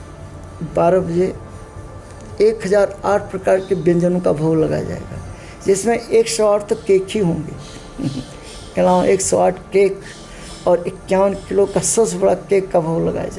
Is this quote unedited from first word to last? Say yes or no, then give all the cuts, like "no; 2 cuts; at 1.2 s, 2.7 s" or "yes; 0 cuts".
yes; 0 cuts